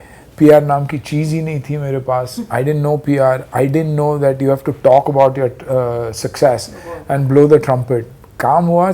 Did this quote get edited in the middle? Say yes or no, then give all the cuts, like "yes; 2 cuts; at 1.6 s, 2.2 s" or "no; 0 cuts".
no; 0 cuts